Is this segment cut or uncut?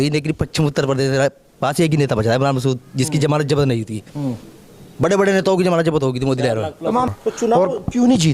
cut